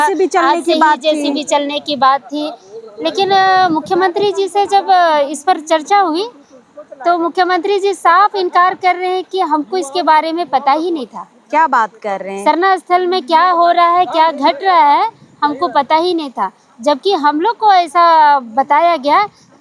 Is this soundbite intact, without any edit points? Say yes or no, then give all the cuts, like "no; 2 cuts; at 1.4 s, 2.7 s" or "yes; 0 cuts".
yes; 0 cuts